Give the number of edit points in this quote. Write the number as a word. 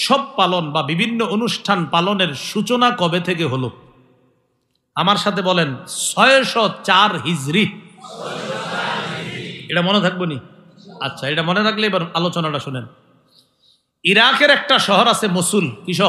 zero